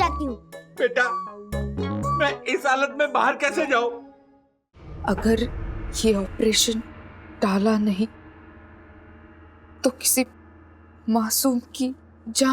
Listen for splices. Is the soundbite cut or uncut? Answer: cut